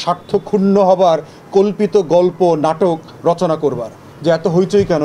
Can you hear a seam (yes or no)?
yes